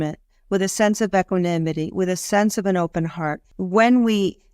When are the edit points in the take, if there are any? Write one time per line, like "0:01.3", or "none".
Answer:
0:03.5

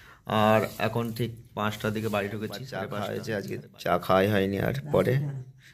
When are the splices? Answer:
0:02.9

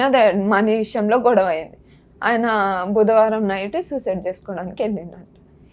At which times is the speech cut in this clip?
none

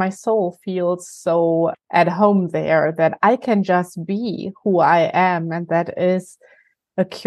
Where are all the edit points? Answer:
0:01.8

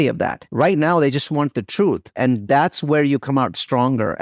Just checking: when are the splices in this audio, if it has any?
0:02.1

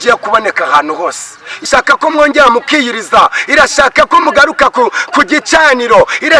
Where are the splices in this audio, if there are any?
0:01.7

